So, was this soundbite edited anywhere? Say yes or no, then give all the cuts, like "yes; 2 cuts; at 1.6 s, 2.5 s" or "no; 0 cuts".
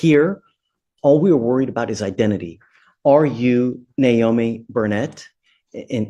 no; 0 cuts